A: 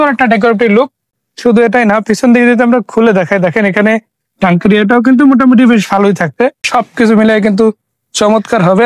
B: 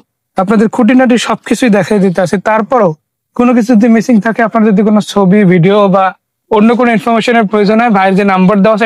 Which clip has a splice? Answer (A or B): A